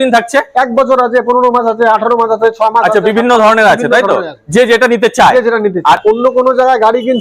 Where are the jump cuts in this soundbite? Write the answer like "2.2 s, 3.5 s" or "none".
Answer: 6.0 s